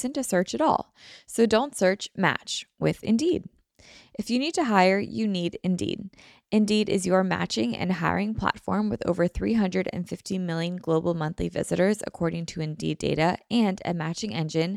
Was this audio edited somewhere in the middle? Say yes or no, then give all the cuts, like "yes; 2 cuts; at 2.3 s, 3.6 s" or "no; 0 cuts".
no; 0 cuts